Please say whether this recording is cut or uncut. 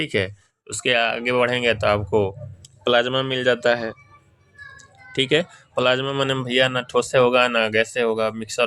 uncut